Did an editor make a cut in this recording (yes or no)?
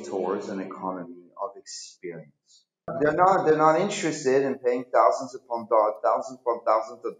yes